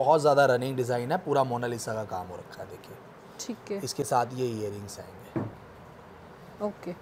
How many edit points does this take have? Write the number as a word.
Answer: zero